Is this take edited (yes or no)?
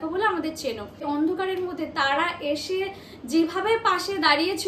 yes